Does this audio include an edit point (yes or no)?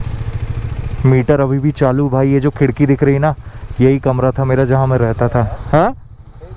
no